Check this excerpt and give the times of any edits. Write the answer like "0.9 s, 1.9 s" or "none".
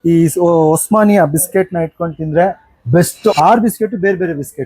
3.3 s